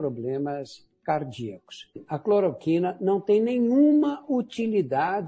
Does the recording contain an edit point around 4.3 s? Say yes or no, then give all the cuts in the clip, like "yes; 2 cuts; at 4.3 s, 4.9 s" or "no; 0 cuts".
no; 1 cut; at 2.1 s